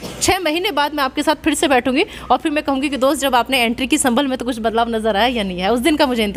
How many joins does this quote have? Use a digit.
0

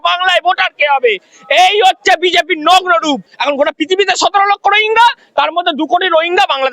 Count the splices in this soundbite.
1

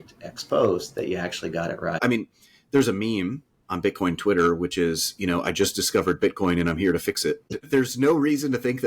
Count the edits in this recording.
2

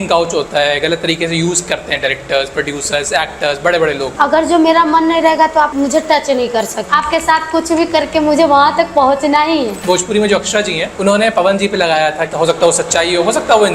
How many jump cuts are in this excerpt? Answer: 6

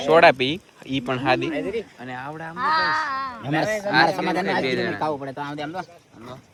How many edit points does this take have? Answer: 0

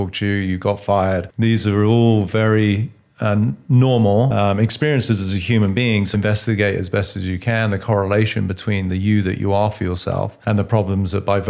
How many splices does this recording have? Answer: 4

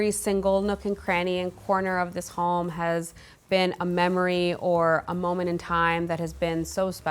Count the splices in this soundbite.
0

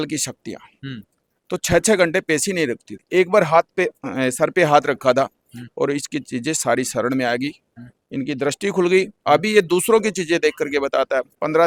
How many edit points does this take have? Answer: 0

